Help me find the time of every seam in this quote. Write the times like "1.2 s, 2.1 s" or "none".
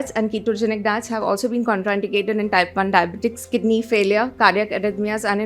none